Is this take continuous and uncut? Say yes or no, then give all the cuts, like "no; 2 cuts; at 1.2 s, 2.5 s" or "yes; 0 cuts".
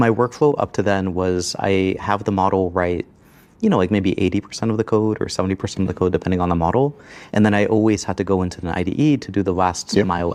yes; 0 cuts